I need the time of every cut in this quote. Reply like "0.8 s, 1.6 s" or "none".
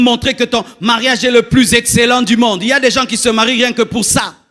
none